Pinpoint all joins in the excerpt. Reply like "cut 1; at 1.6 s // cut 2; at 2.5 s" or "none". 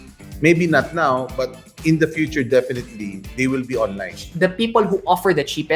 cut 1; at 4.2 s